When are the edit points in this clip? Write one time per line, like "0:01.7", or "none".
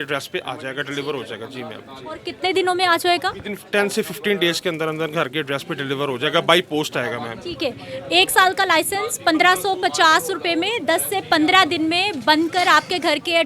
none